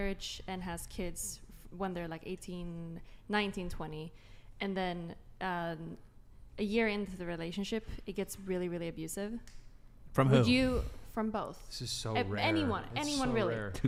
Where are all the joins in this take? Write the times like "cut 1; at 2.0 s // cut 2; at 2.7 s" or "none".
none